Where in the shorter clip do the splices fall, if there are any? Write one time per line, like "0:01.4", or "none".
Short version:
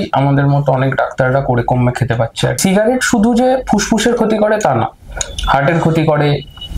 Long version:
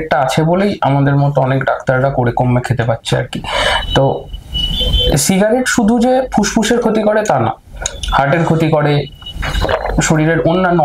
0:02.6